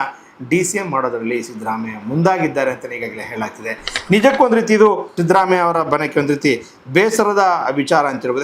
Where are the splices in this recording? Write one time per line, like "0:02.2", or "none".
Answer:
0:05.1